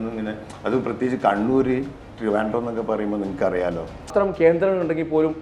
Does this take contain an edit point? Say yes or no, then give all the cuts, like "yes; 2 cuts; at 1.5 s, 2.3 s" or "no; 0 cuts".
yes; 1 cut; at 4.1 s